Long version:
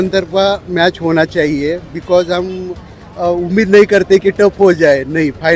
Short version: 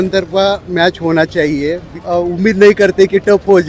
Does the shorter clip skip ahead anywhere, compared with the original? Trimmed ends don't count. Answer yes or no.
yes